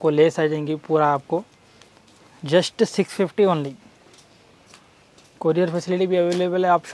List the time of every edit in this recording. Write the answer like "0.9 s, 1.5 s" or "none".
none